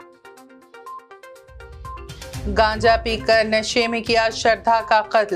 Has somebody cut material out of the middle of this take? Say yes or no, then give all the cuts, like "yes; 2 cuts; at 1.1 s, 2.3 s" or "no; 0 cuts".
yes; 1 cut; at 1.9 s